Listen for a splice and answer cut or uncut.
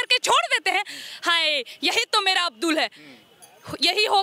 uncut